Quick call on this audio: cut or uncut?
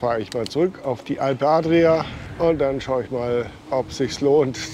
cut